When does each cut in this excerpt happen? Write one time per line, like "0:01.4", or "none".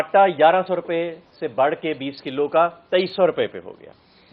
none